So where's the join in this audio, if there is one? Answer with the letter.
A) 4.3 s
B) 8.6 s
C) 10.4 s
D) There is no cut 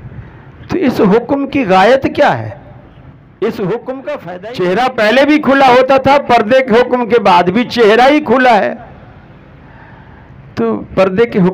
A